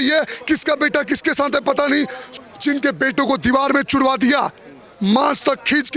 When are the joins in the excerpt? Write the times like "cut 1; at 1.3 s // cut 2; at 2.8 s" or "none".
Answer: cut 1; at 2.2 s